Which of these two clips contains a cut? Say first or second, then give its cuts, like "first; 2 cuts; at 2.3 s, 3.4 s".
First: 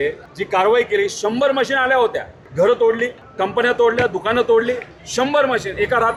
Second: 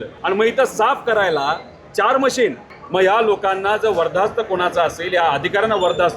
second; 1 cut; at 2.7 s